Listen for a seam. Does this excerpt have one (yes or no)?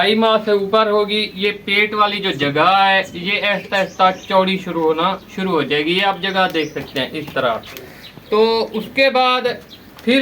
no